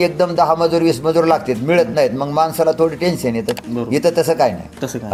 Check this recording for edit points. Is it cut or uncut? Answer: uncut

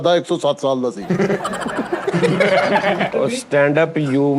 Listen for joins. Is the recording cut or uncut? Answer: cut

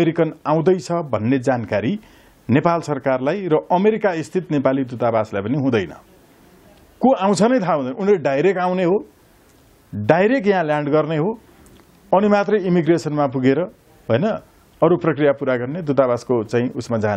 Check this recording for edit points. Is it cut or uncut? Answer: uncut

